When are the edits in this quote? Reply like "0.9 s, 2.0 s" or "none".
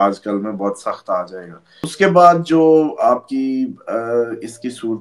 1.9 s

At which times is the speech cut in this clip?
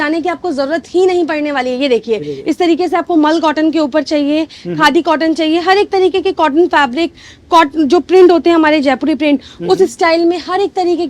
none

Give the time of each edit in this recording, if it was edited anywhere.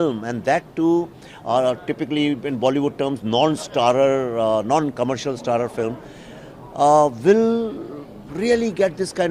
none

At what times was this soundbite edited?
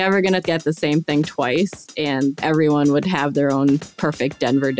2.4 s, 3.9 s

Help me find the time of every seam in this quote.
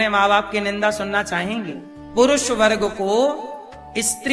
2.1 s

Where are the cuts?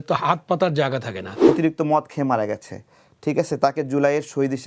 1.2 s

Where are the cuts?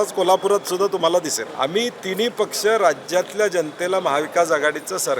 1.4 s

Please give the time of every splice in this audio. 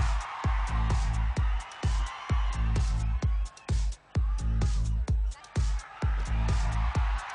3.5 s

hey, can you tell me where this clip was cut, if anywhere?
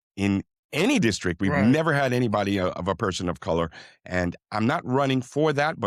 none

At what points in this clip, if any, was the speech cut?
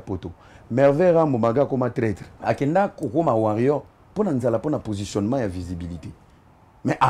2.3 s

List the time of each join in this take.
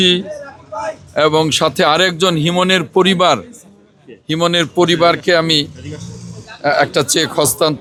none

